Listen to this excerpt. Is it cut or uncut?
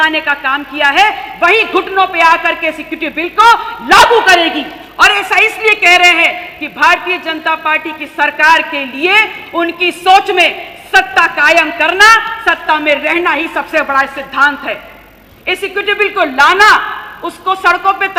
uncut